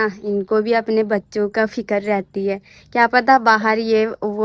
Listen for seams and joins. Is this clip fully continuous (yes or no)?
yes